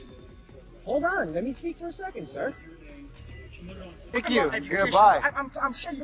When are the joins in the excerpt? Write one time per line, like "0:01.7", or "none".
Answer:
0:04.2